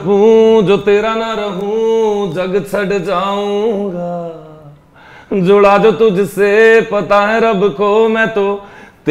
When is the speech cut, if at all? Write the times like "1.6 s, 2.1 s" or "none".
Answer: none